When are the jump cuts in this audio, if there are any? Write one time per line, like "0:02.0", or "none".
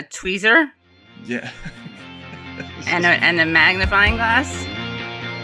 0:04.5